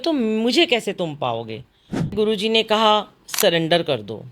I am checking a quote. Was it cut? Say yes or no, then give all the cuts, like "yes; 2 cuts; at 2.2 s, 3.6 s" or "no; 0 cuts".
yes; 1 cut; at 2.1 s